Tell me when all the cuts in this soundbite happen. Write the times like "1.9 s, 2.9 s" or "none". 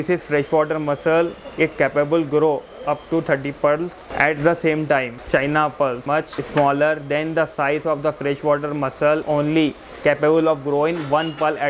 4.0 s, 5.2 s, 6.1 s, 9.2 s